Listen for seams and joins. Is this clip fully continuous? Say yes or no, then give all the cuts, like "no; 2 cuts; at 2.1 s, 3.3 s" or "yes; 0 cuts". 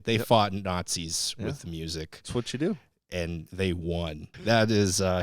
no; 1 cut; at 4.2 s